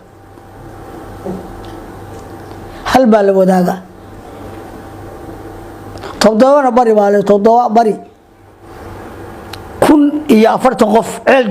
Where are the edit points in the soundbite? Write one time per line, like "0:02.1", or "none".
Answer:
0:08.6